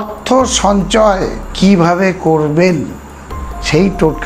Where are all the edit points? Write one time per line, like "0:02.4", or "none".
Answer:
0:01.4

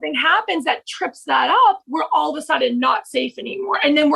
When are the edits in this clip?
none

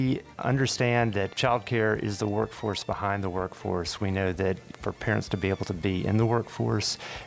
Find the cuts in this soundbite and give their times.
0:01.3

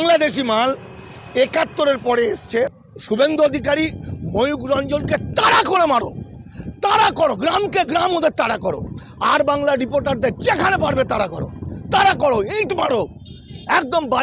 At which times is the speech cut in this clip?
0:02.9

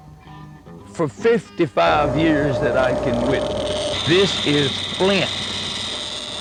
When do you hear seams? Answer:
none

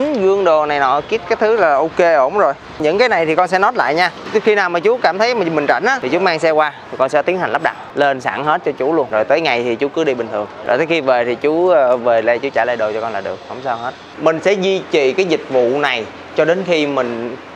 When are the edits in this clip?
0:02.8
0:06.0
0:09.1
0:10.5
0:14.1

